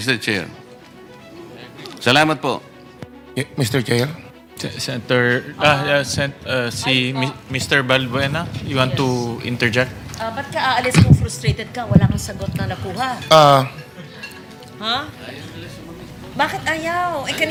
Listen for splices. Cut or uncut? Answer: uncut